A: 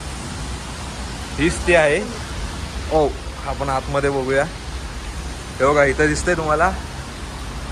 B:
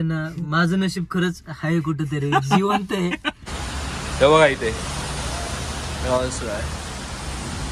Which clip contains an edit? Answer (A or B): B